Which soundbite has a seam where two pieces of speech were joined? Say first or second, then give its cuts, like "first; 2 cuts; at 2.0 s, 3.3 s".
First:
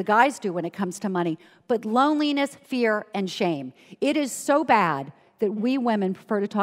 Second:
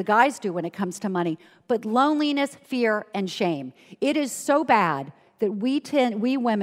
first; 1 cut; at 5.6 s